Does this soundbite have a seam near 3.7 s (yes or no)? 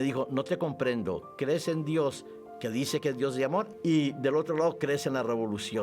yes